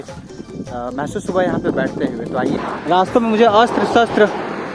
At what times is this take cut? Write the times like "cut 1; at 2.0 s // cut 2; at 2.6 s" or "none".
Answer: cut 1; at 2.6 s